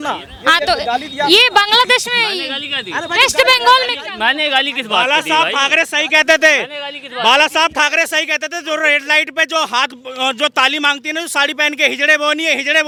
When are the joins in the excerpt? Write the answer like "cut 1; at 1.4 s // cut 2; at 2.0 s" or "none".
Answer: none